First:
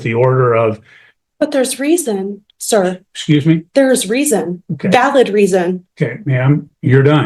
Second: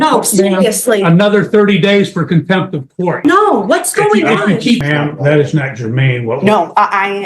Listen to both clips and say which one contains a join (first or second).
second